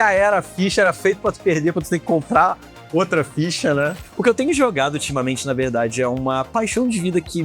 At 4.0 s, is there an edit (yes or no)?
yes